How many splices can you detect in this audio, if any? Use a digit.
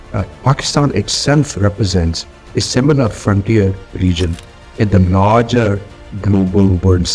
0